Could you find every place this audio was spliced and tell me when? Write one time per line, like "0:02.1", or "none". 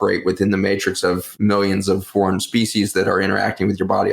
0:01.3
0:02.1